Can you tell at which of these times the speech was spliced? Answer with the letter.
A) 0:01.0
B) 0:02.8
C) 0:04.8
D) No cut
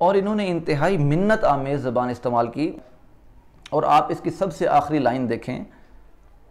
B